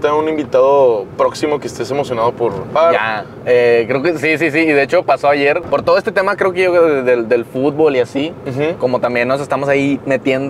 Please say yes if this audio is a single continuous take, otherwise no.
no